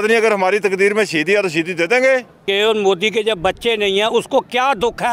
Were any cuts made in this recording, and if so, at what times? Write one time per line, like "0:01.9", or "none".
0:02.4